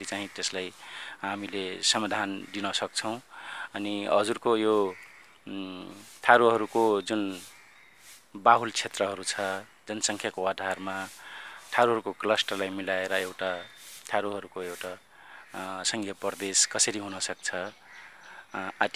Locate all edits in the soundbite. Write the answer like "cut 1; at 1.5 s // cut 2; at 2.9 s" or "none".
none